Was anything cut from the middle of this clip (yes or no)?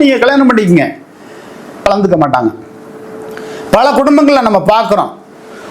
yes